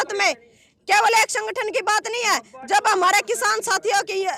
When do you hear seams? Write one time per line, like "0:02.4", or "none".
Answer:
none